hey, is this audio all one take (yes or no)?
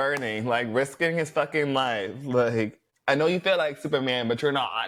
yes